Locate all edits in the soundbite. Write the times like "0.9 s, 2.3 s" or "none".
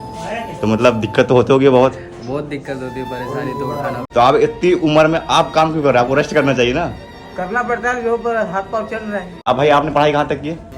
4.0 s, 9.5 s